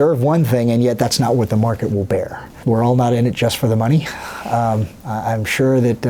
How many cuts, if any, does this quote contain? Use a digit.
1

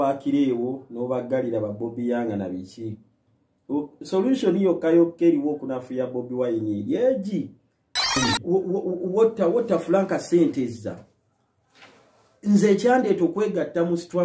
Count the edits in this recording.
1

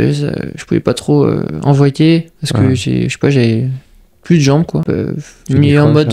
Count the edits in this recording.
1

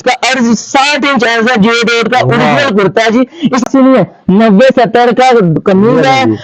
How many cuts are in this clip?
1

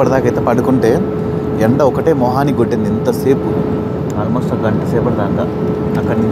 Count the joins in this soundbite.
0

